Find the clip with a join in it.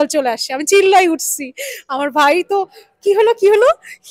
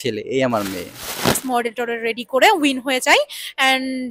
second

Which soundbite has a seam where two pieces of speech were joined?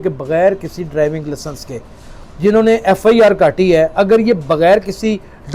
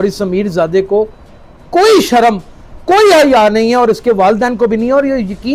first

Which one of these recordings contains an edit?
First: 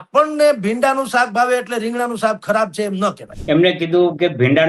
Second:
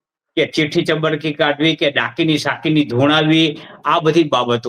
first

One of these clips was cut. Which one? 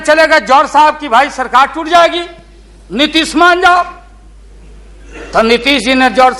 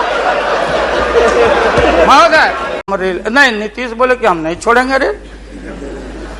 second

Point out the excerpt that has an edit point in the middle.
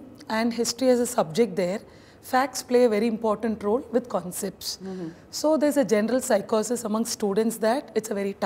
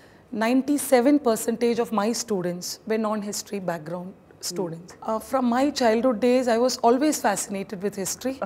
second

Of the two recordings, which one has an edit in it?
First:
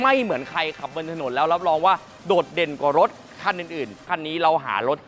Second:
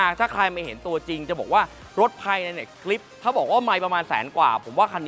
first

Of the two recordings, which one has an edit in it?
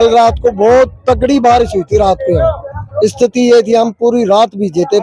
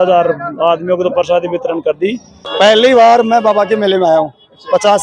second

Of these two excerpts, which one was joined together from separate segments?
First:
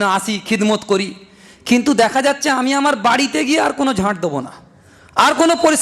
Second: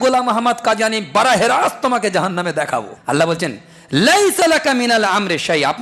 second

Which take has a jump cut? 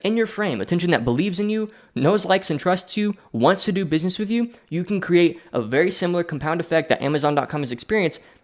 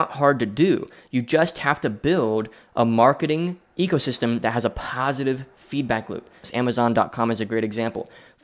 second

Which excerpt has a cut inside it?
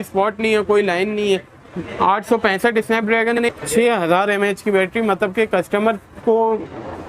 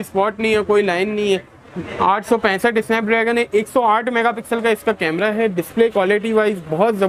first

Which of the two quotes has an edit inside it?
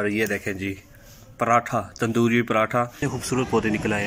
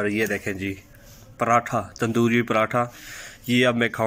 first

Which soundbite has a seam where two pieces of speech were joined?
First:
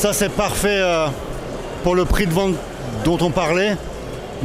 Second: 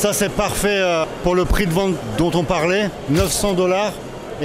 second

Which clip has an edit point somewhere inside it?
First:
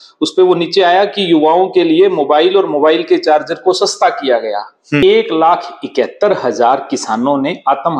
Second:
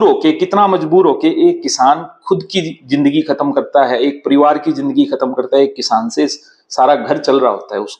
first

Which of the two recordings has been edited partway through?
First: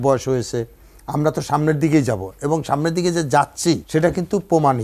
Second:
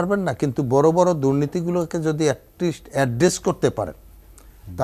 first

